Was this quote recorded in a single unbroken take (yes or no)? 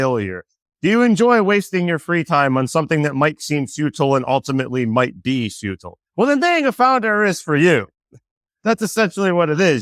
yes